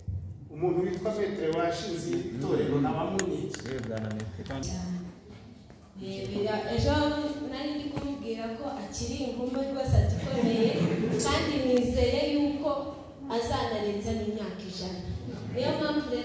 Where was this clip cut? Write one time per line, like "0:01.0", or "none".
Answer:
0:04.6